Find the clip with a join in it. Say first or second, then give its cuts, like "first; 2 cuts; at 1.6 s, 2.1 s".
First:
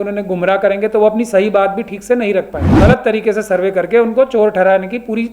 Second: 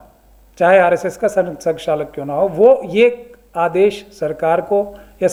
first; 1 cut; at 2.6 s